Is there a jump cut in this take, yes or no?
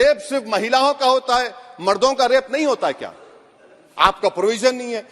no